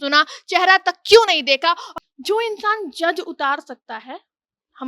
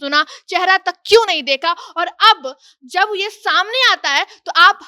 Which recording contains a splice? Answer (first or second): first